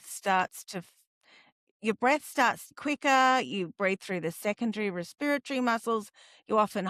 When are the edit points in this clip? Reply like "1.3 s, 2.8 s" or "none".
2.7 s

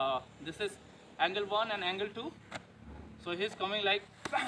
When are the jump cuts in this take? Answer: none

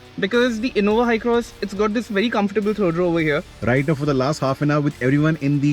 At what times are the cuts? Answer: 3.5 s

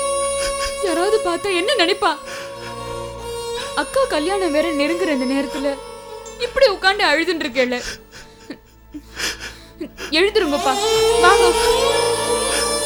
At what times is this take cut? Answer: none

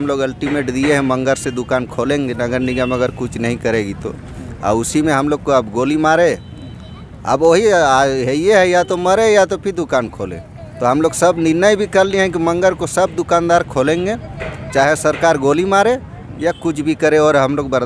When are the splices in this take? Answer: none

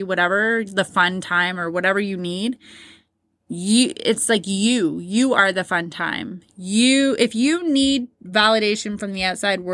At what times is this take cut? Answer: none

